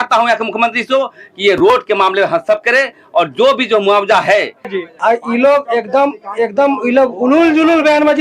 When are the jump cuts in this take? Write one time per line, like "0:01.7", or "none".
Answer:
0:04.7